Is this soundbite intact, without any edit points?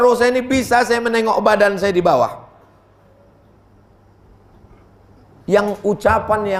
yes; 0 cuts

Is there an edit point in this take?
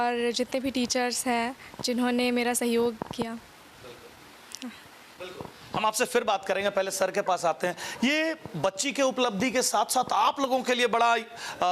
no; 0 cuts

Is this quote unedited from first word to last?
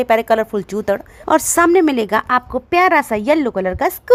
yes; 0 cuts

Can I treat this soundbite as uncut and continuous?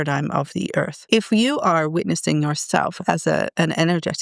no; 1 cut; at 1.0 s

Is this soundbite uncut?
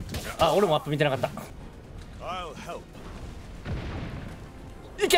no; 1 cut; at 1.6 s

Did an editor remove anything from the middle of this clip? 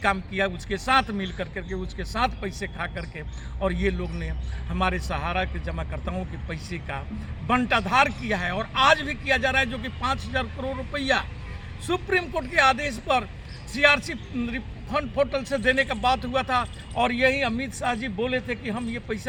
no; 0 cuts

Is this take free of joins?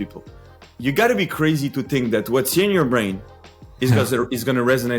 yes; 0 cuts

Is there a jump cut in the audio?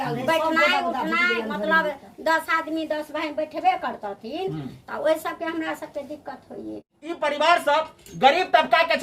no; 0 cuts

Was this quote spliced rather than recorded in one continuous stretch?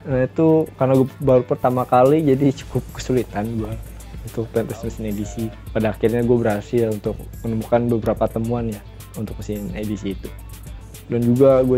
yes; 1 cut; at 5.5 s

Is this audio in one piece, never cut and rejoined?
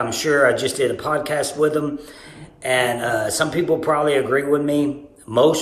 yes; 0 cuts

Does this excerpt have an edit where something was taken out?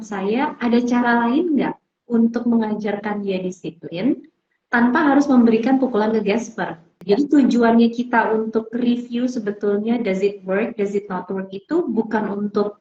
yes; 1 cut; at 6.9 s

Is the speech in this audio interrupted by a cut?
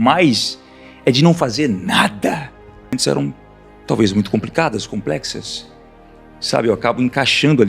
yes; 1 cut; at 3.0 s

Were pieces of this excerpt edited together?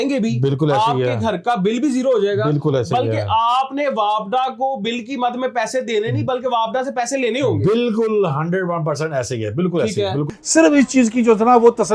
yes; 1 cut; at 10.2 s

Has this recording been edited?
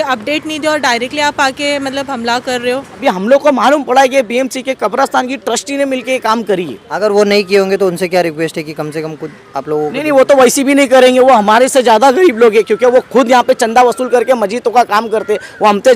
yes; 1 cut; at 3.0 s

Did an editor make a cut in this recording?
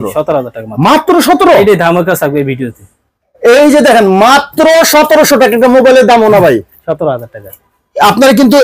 no; 0 cuts

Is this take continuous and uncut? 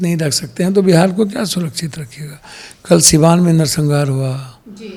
yes; 0 cuts

